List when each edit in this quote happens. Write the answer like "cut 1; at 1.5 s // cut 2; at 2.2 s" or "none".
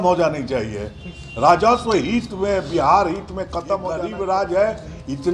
cut 1; at 4.0 s